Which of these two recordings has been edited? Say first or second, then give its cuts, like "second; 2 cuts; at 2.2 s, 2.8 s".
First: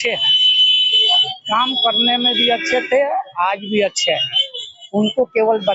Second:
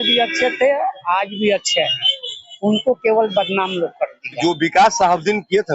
second; 1 cut; at 4.4 s